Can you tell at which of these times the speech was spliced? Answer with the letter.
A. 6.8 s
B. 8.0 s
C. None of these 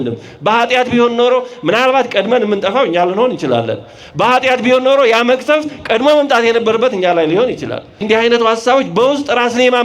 B